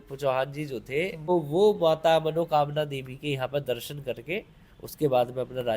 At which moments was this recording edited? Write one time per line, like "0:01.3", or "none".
0:01.3